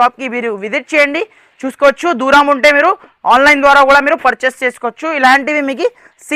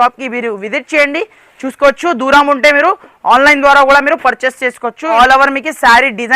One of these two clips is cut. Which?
second; 1 cut; at 5.1 s

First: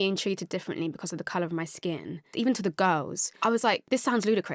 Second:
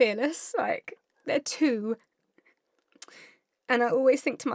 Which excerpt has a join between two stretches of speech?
first; 2 cuts; at 2.3 s, 3.6 s

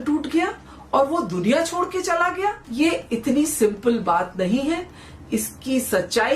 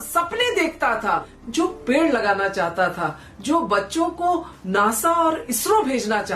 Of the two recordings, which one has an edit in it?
second; 1 cut; at 1.4 s

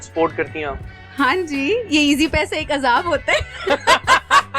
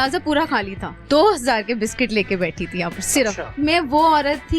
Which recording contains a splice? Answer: second; 2 cuts; at 0.9 s, 3.5 s

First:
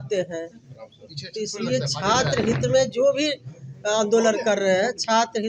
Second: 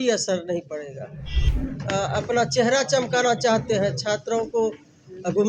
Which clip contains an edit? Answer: second; 1 cut; at 1.4 s

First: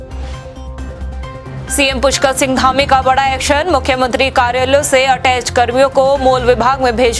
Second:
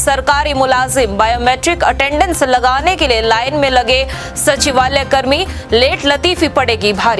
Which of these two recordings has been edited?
first; 1 cut; at 1.4 s

